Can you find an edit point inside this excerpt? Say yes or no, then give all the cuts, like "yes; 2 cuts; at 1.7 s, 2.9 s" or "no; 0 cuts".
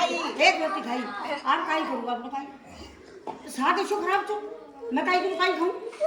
no; 0 cuts